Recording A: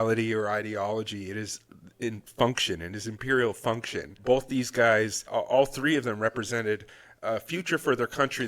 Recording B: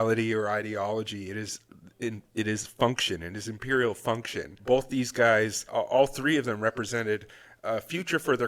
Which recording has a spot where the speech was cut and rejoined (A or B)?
A